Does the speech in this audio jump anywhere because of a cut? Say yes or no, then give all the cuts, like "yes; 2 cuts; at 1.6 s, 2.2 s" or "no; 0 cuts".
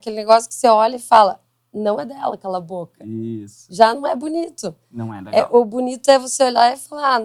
no; 0 cuts